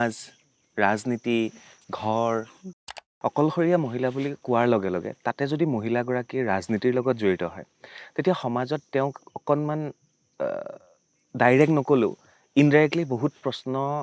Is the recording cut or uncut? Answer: cut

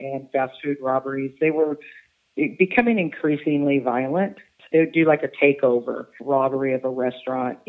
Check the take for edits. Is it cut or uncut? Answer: cut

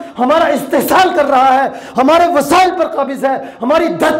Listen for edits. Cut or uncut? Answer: uncut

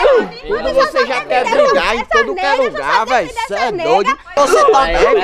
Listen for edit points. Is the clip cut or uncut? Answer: cut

